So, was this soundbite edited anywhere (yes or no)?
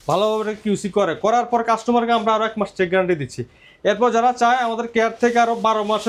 no